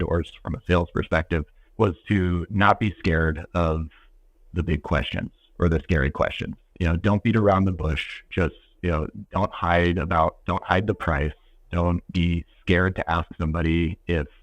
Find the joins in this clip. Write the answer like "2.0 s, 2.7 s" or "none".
1.6 s, 12.1 s